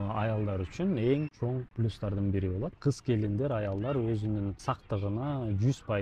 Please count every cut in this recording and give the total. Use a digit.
2